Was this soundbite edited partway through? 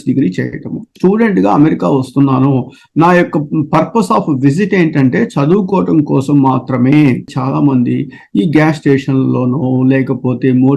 yes; 2 cuts; at 0.9 s, 7.3 s

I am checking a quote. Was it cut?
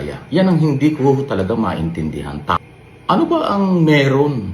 yes; 1 cut; at 2.6 s

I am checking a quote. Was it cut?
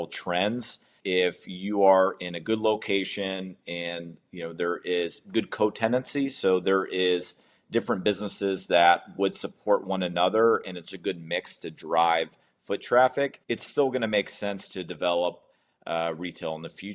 yes; 2 cuts; at 0.9 s, 13.4 s

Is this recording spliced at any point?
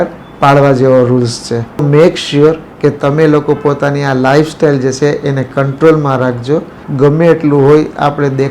yes; 2 cuts; at 1.8 s, 6.8 s

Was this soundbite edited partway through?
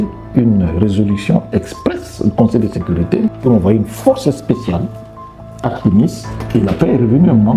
yes; 2 cuts; at 3.4 s, 6.3 s

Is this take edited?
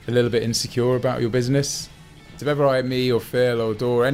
yes; 1 cut; at 2.3 s

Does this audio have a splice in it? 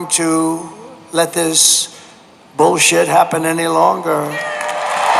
no; 0 cuts

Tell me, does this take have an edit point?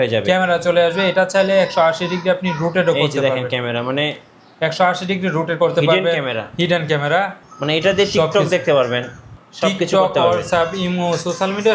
yes; 1 cut; at 7.4 s

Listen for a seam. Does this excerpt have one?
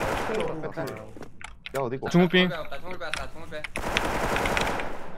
yes; 1 cut; at 2.1 s

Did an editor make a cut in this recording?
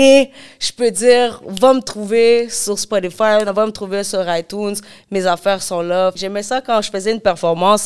yes; 1 cut; at 6.2 s

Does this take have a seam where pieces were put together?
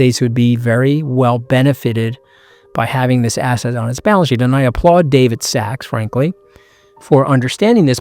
no; 0 cuts

